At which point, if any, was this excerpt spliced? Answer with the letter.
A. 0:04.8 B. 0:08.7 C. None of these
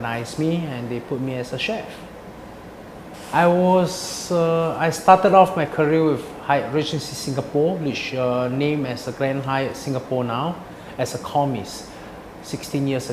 A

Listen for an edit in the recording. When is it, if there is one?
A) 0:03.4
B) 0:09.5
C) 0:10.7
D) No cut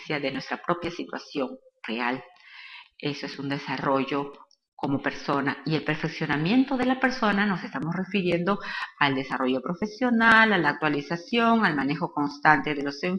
B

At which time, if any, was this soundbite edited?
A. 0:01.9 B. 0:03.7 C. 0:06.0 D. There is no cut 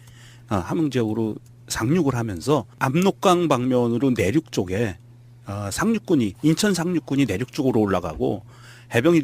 C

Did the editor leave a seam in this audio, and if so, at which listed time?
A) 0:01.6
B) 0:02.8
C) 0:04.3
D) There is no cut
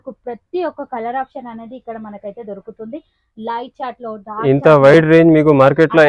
D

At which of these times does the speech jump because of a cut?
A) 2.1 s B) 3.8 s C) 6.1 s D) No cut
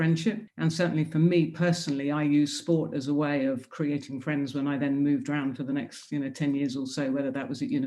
D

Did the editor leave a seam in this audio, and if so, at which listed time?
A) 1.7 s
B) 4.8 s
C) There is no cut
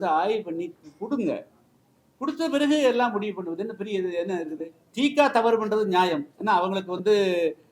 B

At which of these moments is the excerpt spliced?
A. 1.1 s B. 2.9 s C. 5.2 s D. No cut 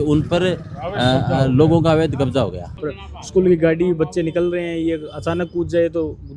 B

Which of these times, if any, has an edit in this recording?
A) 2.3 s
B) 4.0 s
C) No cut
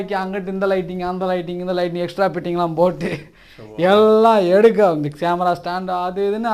C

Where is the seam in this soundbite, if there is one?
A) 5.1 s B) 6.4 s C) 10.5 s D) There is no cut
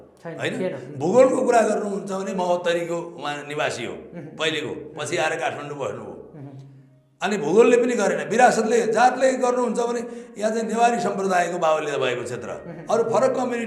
D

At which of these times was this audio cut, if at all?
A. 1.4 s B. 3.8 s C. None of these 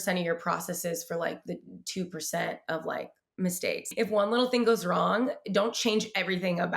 B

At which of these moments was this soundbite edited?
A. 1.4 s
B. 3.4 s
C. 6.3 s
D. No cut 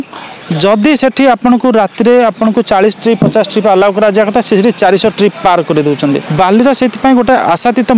C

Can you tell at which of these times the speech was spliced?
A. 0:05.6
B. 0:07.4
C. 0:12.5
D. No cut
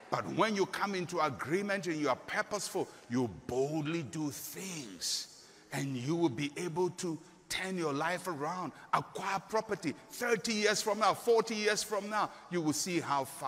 D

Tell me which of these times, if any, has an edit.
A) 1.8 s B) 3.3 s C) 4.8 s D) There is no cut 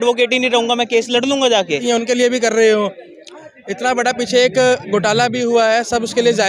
A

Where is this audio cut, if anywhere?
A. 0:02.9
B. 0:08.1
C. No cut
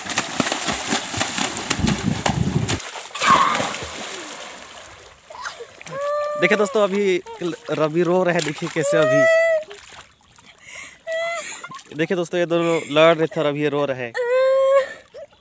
A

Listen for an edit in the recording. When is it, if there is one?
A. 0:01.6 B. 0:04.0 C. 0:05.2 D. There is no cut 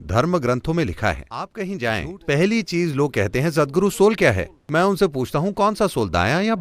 A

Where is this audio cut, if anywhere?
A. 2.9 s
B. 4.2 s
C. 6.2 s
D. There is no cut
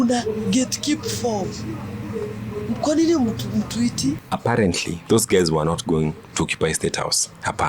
B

